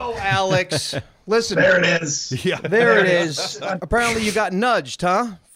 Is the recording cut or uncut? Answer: cut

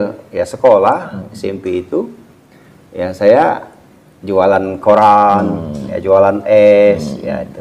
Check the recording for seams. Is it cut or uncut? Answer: uncut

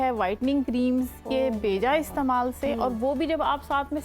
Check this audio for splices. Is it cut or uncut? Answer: uncut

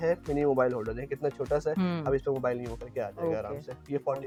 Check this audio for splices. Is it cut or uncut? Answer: uncut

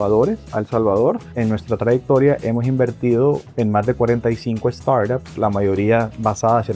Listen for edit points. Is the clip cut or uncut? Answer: cut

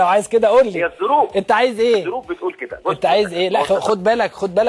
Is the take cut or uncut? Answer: cut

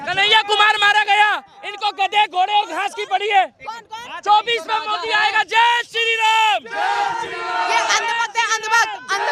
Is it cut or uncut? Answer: uncut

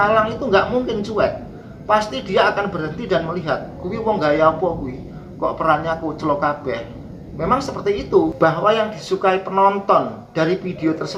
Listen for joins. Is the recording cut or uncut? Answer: cut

